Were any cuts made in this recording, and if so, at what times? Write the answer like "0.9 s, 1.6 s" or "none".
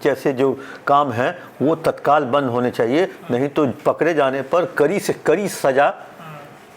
none